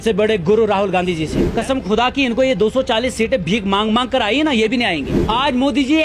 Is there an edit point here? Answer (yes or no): yes